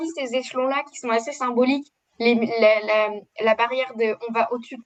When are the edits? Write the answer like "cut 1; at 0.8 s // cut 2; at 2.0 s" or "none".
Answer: none